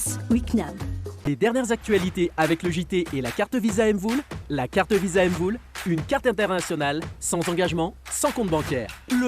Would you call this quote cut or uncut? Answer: cut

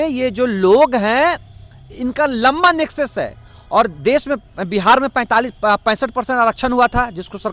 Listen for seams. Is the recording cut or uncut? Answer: uncut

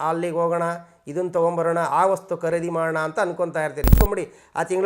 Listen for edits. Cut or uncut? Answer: cut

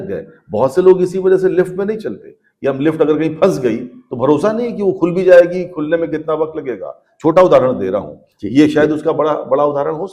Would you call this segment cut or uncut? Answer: uncut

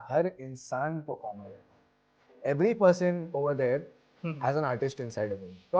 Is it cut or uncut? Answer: uncut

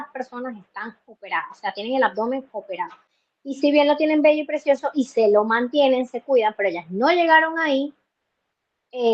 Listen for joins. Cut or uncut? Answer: uncut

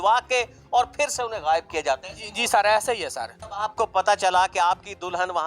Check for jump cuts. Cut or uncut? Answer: cut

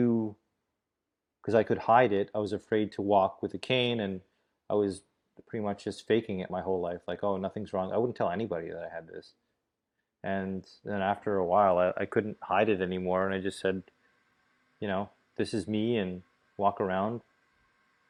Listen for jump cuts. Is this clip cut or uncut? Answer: uncut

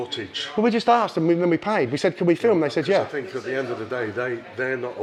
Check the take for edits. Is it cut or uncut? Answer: uncut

